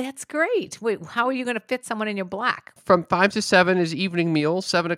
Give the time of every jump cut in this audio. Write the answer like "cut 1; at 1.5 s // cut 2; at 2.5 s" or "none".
cut 1; at 2.8 s